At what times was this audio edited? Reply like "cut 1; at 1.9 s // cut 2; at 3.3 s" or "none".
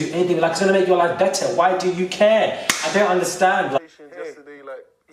cut 1; at 3.8 s